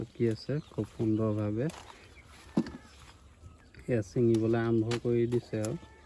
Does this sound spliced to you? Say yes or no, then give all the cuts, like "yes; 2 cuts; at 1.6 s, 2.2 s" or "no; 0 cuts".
no; 0 cuts